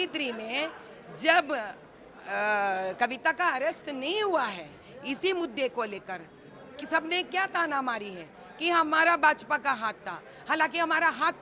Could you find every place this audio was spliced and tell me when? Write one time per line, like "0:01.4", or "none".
none